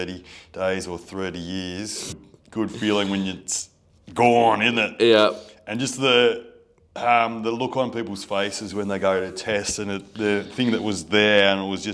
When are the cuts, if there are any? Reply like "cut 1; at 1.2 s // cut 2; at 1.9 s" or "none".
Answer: cut 1; at 2.2 s